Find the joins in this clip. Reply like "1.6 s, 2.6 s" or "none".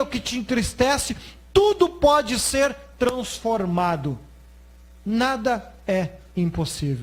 none